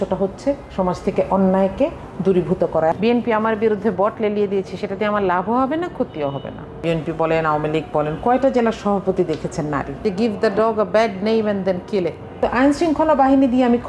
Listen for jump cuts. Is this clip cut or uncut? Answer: cut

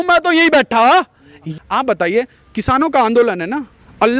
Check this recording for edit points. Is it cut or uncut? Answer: cut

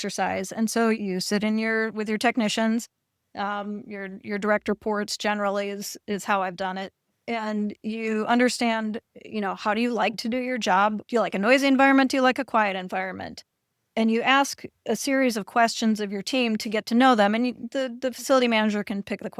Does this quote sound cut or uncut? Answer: cut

